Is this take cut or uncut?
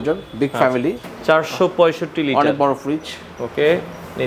cut